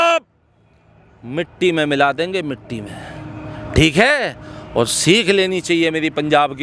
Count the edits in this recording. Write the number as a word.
zero